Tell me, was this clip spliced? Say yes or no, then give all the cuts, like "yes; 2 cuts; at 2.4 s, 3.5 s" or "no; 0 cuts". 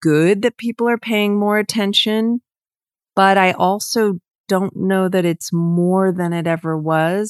no; 0 cuts